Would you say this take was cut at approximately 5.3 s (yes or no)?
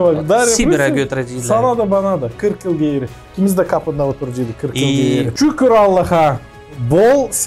yes